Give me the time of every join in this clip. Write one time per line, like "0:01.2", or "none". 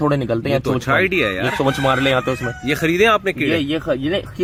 none